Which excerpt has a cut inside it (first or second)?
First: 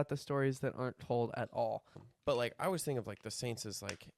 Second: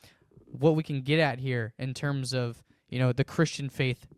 first